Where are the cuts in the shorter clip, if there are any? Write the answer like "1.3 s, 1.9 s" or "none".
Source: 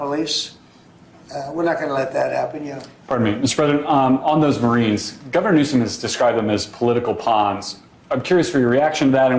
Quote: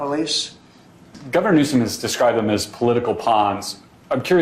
1.1 s